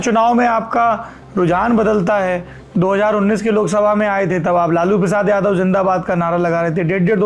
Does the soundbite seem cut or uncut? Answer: uncut